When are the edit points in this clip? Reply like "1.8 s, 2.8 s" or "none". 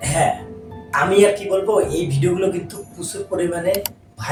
none